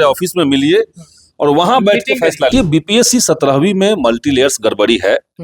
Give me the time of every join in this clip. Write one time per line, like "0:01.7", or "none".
0:02.5